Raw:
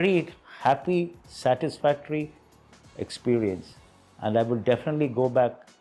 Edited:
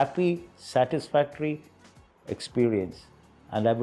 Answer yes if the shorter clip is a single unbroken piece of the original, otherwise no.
yes